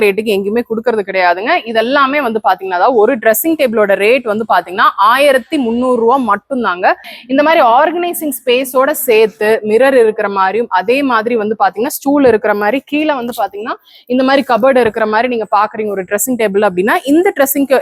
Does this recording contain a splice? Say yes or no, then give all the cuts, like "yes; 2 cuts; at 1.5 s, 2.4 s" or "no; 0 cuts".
yes; 1 cut; at 7.1 s